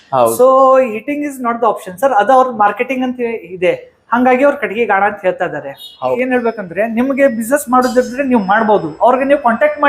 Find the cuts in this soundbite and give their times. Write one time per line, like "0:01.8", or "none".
0:06.1

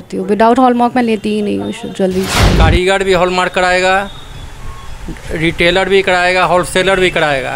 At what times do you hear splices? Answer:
0:02.4

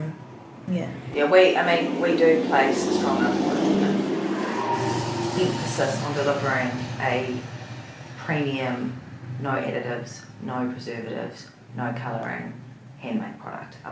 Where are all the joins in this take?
0:01.1

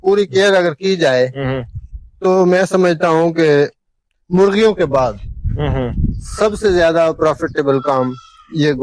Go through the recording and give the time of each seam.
none

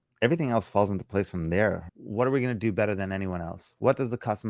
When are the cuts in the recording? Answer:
0:01.9

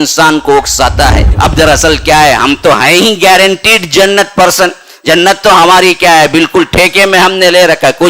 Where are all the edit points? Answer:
0:01.3

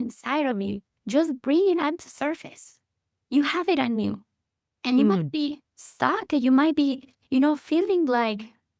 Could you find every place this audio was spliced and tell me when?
none

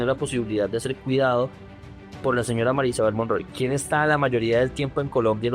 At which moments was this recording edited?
0:03.5

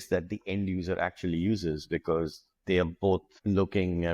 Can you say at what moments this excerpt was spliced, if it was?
none

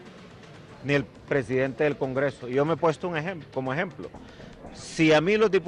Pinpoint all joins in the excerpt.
none

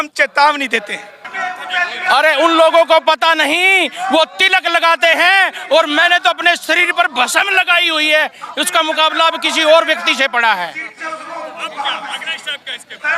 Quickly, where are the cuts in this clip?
0:01.3

